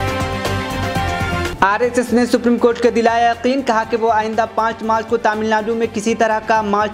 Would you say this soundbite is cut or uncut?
cut